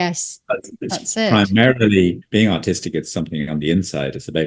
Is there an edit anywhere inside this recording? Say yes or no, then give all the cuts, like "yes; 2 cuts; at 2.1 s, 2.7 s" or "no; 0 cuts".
yes; 1 cut; at 2.2 s